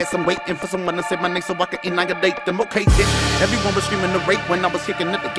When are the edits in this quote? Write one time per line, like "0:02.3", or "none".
none